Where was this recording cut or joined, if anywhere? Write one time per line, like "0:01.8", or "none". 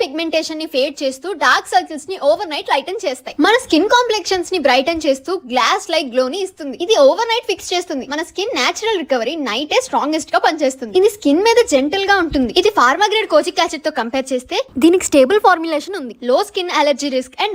none